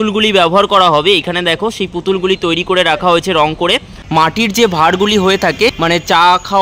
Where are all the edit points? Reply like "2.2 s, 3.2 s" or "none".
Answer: 4.0 s, 5.8 s

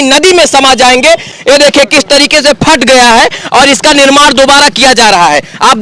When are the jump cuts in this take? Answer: 1.3 s

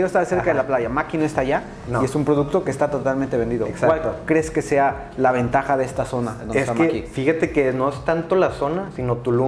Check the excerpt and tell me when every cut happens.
none

